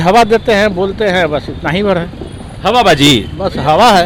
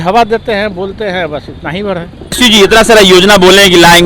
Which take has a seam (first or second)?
second